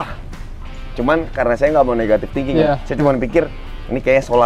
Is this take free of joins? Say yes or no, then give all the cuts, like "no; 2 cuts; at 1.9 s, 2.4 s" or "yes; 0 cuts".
no; 1 cut; at 2.7 s